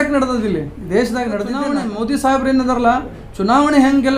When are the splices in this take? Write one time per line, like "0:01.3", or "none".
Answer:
0:01.6